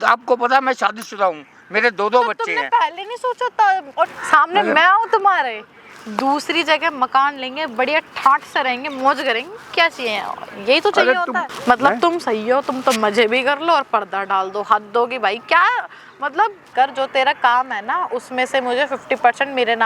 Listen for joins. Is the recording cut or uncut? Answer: cut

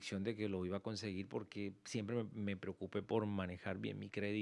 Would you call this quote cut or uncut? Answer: uncut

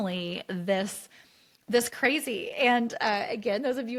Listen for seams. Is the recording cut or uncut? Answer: uncut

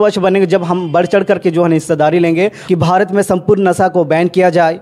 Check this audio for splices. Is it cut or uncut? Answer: cut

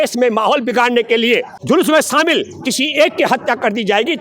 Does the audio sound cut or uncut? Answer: cut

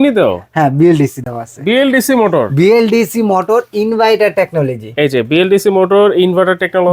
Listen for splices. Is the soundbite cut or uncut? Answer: uncut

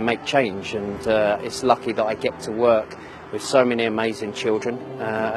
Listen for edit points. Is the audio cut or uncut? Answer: uncut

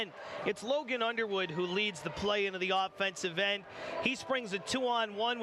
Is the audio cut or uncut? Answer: uncut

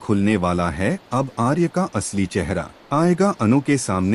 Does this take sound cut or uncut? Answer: cut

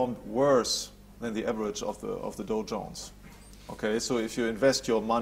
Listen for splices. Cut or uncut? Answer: uncut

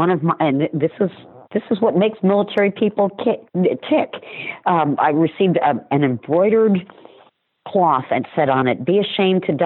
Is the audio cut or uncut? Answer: uncut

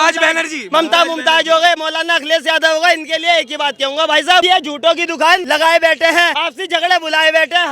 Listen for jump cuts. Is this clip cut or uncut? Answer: cut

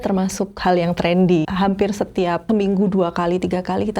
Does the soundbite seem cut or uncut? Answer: cut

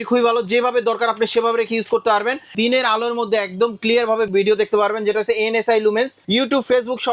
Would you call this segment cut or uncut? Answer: cut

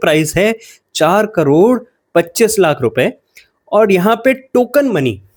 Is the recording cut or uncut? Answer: uncut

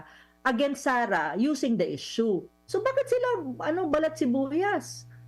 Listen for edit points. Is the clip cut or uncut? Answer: cut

